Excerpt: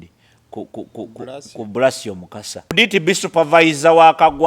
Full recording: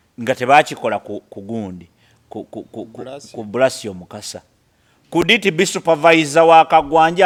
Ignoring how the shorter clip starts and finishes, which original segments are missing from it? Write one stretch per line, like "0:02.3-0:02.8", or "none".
0:04.5-0:05.3